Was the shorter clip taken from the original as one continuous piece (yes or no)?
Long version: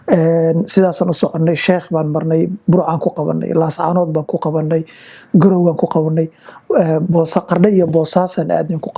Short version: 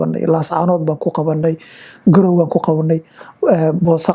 yes